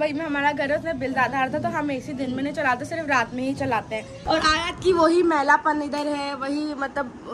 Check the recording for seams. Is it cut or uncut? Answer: cut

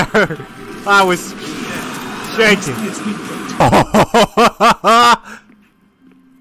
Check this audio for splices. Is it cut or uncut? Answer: cut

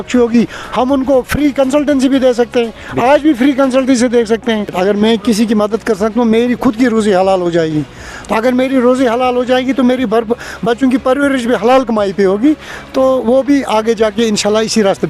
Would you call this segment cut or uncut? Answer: cut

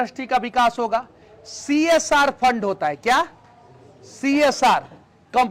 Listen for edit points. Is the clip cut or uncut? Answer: uncut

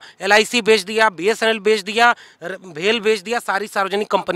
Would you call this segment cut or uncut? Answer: uncut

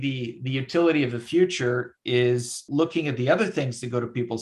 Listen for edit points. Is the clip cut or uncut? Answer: cut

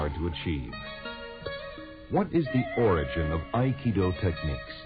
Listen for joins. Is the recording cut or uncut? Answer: cut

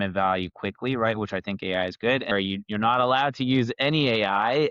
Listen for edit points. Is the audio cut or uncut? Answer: cut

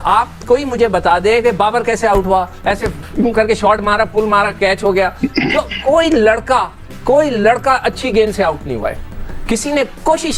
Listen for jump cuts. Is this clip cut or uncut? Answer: uncut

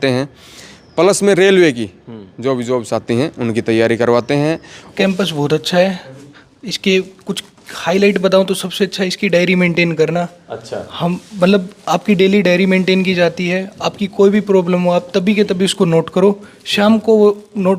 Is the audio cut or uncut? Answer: cut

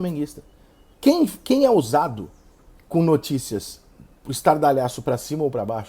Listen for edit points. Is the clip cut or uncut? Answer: uncut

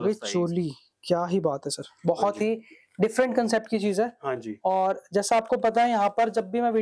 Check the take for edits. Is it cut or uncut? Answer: uncut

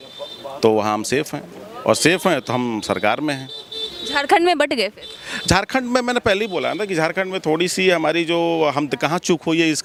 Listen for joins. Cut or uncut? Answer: uncut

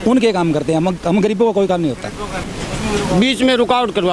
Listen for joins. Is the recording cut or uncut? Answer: cut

